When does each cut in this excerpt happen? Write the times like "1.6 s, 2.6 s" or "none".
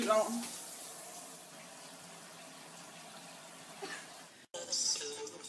none

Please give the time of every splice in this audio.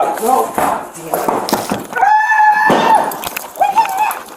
1.4 s

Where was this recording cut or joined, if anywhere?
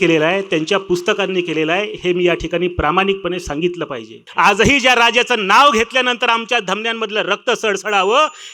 4.2 s

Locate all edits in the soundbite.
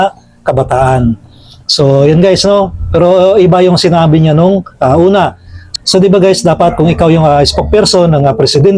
none

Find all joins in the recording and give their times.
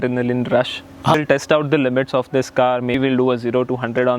1.1 s, 2.9 s

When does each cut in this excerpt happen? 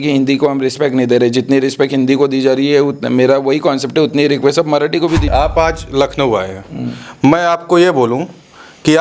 5.3 s

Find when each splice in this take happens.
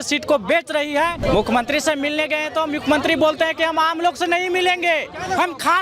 1.2 s

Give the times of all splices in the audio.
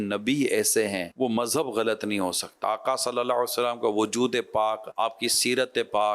1.1 s, 2.6 s, 4.9 s

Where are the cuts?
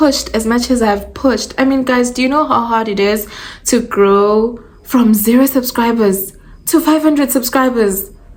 none

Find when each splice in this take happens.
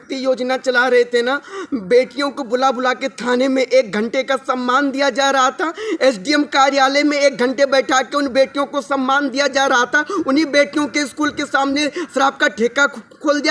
none

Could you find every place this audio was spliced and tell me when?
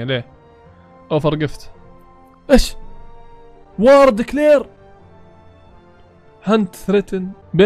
none

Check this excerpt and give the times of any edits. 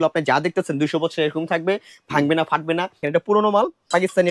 3.0 s

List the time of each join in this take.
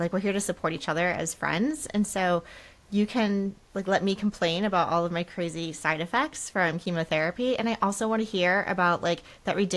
none

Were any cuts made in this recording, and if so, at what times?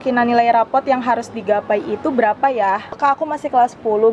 2.9 s

